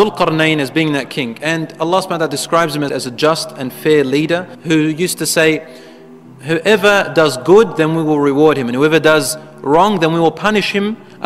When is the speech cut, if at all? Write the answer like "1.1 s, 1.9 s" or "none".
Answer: 2.9 s